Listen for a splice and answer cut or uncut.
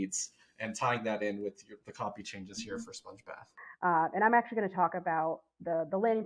cut